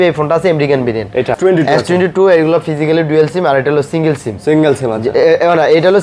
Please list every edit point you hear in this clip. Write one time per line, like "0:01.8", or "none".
0:01.4

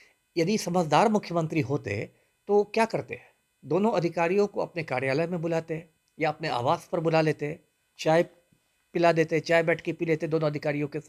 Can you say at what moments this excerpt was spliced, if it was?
none

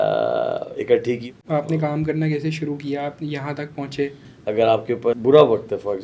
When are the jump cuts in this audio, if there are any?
0:01.3
0:04.3
0:05.1

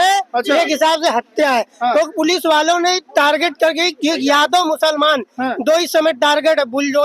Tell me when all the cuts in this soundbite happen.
none

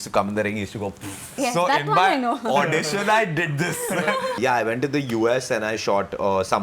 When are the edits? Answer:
0:01.3
0:04.4

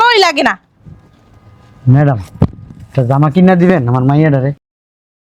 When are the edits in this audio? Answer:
none

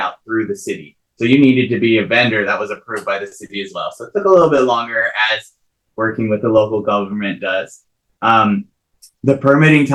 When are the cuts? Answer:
none

